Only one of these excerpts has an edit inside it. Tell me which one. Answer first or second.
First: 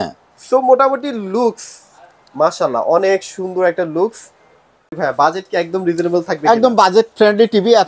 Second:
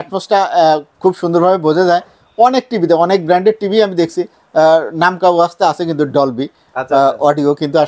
first